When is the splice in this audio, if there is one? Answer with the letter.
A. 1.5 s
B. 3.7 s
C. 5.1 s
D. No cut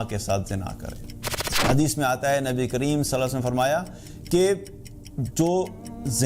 A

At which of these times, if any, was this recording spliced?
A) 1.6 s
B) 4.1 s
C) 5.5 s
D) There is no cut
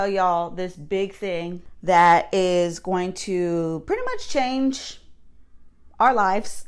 A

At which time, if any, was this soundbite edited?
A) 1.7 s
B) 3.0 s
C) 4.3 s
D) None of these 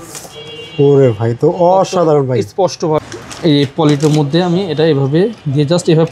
B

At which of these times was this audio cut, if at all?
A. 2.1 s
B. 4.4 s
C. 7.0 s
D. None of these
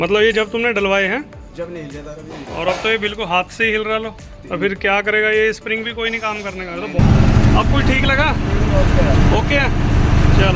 C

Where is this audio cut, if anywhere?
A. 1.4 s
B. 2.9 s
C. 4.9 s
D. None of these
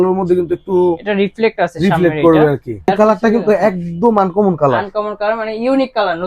B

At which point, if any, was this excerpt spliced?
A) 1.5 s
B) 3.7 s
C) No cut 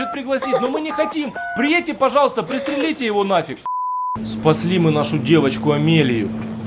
B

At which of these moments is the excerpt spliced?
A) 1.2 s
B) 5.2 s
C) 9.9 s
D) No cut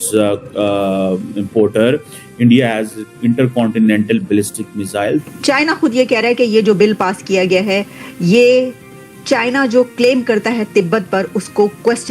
B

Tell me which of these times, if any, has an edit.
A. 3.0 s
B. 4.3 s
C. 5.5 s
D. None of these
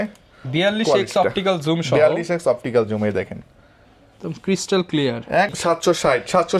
C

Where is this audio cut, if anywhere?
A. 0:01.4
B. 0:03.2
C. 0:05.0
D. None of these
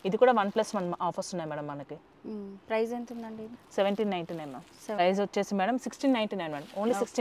C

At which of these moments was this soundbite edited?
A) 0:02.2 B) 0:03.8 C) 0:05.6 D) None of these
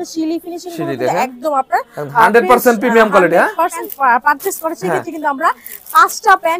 B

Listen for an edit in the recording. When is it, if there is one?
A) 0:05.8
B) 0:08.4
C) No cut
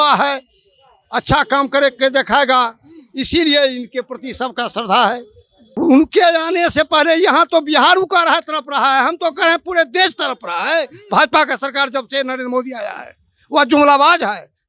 A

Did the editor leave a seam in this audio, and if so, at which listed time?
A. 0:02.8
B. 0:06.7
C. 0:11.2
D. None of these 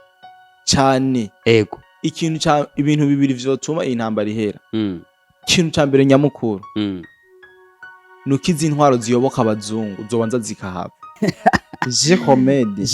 C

